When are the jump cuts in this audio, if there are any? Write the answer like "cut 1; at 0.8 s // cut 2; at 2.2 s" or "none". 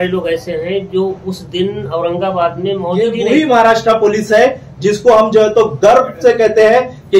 cut 1; at 3.0 s